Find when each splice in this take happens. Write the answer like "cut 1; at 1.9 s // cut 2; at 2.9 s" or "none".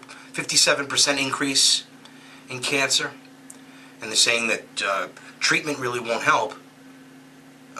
cut 1; at 2.1 s